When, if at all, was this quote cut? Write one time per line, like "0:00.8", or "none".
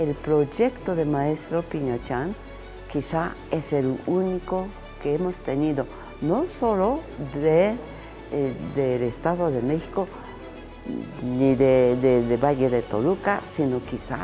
none